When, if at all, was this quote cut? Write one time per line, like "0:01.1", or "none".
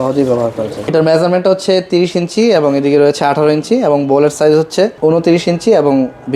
0:00.9
0:04.9